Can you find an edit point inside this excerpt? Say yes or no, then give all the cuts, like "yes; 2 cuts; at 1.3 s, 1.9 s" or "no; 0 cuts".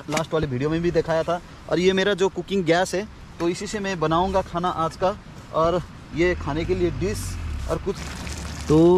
yes; 1 cut; at 8.0 s